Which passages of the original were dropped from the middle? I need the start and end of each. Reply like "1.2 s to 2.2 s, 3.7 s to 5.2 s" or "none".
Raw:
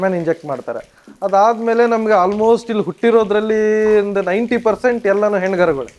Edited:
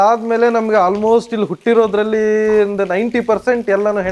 none